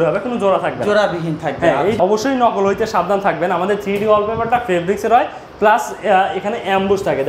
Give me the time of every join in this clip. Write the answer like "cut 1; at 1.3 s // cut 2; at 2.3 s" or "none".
cut 1; at 2.0 s